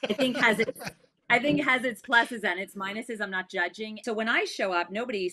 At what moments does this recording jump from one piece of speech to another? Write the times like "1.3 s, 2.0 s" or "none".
4.0 s